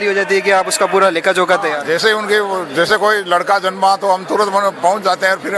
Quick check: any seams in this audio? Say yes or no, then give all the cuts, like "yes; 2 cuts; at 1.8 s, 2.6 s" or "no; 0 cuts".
no; 0 cuts